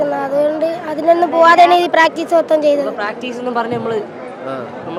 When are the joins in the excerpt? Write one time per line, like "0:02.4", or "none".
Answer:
none